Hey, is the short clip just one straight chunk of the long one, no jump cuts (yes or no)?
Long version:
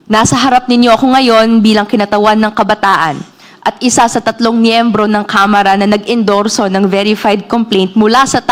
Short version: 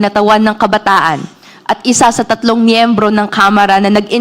yes